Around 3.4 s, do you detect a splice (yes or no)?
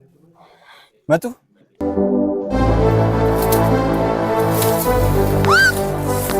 no